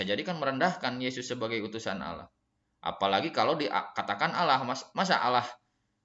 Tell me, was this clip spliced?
no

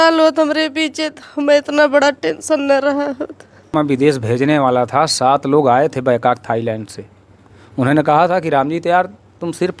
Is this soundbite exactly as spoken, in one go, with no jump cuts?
no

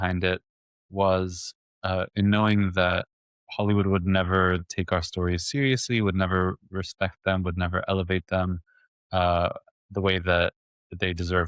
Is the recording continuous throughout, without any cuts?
yes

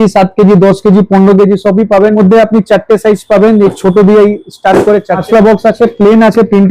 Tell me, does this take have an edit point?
yes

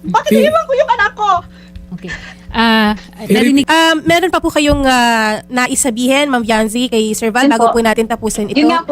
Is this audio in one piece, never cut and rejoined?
no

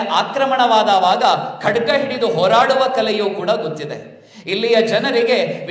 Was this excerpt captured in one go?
yes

